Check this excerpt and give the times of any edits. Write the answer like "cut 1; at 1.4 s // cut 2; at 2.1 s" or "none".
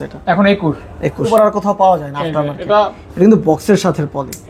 cut 1; at 1.3 s